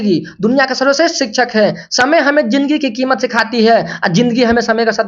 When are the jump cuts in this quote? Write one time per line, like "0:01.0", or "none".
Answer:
none